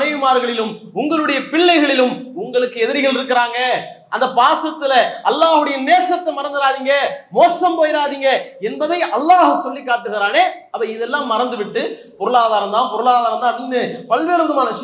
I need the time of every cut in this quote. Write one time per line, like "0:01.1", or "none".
0:10.6